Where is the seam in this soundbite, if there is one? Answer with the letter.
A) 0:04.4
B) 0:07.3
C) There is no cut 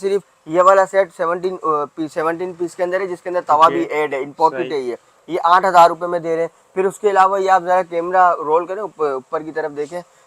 C